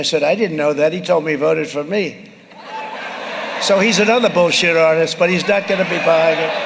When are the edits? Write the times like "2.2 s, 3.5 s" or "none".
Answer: none